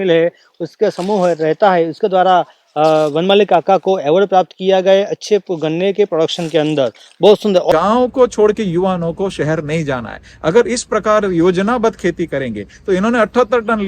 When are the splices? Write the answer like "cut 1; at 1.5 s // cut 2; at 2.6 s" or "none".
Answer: cut 1; at 7.7 s